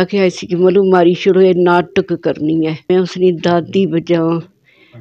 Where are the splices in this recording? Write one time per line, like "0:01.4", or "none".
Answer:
0:02.9